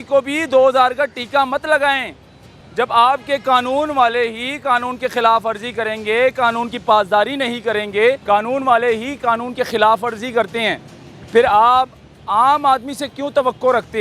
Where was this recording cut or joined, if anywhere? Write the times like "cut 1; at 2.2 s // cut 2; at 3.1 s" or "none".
cut 1; at 8.2 s